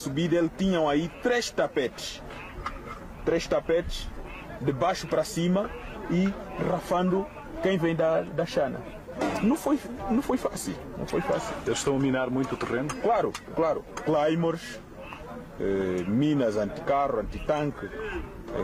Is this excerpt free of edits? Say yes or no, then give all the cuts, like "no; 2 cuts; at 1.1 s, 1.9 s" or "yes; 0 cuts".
yes; 0 cuts